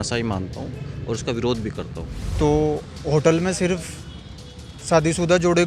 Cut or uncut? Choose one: cut